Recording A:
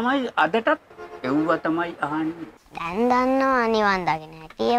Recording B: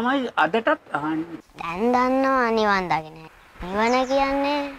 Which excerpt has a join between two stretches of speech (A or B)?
B